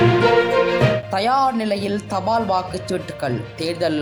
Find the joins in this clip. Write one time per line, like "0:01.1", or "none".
none